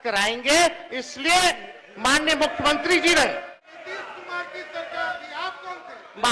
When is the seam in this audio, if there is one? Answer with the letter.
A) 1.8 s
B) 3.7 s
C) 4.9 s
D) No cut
B